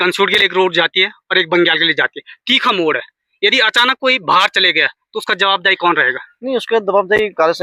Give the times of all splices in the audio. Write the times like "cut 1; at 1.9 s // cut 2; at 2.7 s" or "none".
none